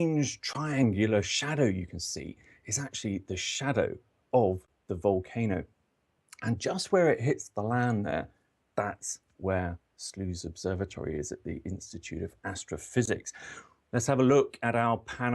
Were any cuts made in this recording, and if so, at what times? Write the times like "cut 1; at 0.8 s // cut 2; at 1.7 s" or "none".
cut 1; at 3.2 s